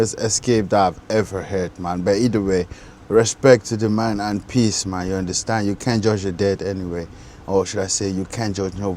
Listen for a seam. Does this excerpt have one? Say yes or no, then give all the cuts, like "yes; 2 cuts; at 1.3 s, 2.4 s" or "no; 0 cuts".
no; 0 cuts